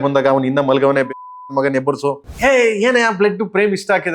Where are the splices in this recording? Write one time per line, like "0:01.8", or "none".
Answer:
0:02.3